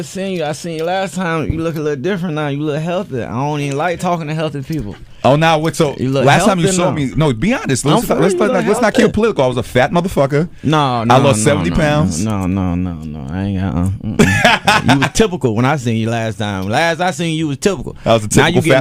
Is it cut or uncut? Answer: uncut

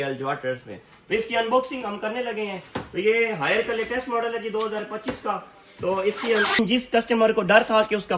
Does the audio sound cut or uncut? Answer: cut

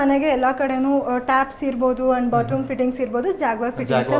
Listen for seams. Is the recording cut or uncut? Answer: uncut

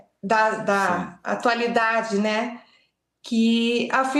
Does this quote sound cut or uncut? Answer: uncut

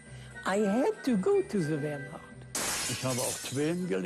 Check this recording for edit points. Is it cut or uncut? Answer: cut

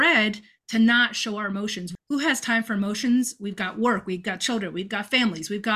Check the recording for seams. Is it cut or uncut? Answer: cut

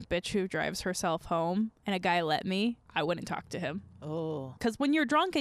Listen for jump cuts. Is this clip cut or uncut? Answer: cut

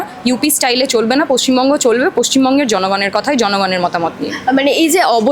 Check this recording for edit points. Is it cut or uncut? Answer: uncut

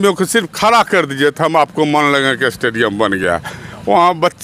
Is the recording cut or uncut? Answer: uncut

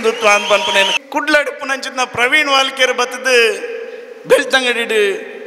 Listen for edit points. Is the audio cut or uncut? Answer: cut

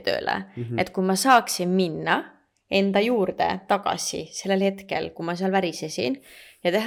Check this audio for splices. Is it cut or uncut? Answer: uncut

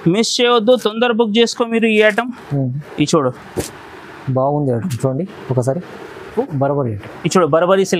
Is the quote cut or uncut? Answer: cut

